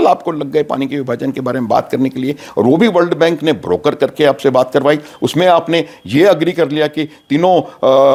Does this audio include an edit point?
no; 0 cuts

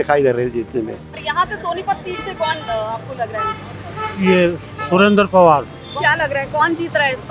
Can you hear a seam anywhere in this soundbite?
yes; 2 cuts; at 1.2 s, 5.8 s

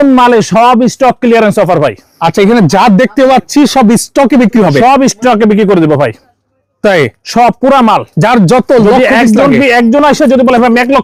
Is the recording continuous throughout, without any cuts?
yes; 0 cuts

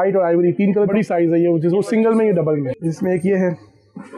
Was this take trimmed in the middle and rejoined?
yes; 2 cuts; at 0.9 s, 2.8 s

